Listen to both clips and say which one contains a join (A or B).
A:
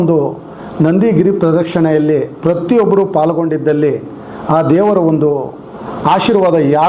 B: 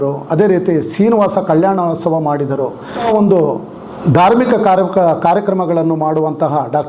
B